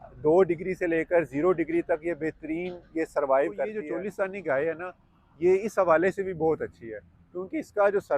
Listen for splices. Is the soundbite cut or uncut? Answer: cut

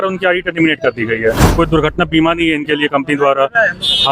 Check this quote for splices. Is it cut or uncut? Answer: cut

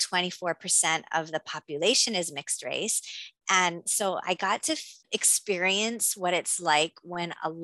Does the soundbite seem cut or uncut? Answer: uncut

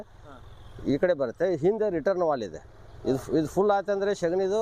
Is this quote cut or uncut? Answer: uncut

